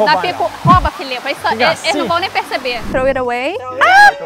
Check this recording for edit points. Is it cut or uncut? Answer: cut